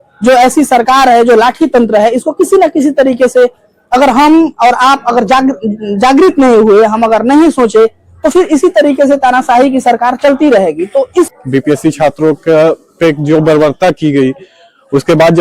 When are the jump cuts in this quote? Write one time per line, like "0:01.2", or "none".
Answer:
0:11.4